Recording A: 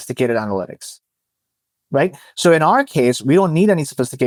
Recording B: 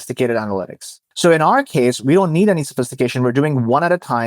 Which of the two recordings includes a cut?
B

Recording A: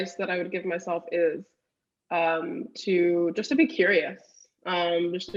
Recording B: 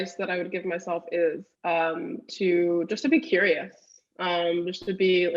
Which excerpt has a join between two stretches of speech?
B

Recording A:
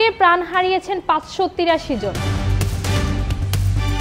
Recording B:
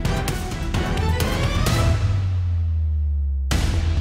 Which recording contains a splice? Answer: A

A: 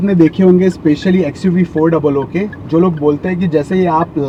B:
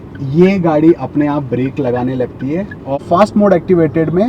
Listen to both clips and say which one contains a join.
B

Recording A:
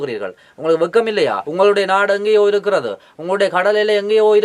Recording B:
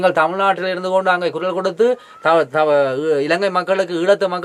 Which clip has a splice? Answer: A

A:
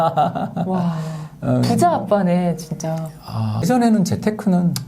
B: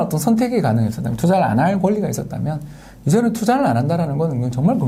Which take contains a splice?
A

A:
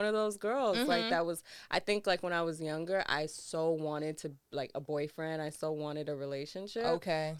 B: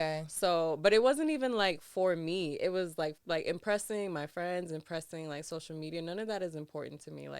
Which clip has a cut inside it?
B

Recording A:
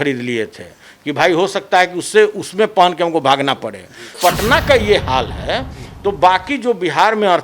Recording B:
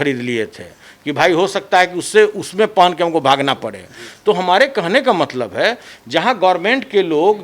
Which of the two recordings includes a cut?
A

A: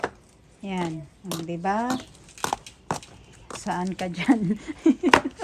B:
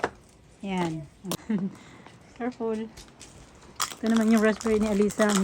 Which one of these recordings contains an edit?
B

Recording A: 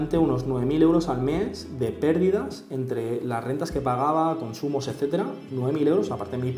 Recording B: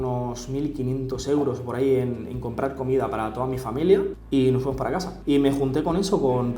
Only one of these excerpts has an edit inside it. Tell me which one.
B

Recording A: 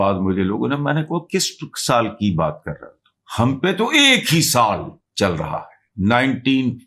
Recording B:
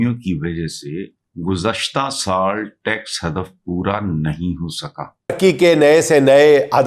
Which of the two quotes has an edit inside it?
B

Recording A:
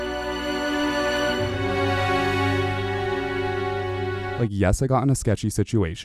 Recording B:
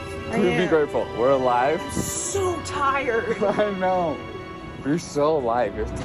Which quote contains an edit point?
A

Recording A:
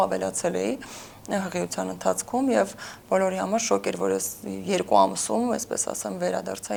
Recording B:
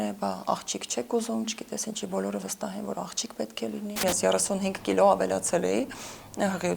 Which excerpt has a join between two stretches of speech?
B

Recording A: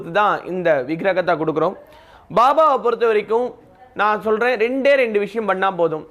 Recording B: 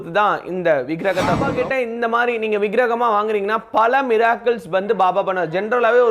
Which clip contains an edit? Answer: B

